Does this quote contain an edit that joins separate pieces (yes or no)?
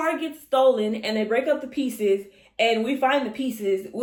no